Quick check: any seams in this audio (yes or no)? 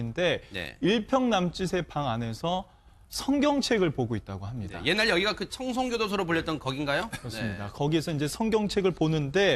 yes